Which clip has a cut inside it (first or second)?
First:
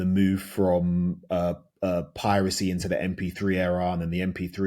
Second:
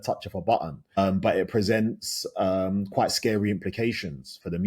second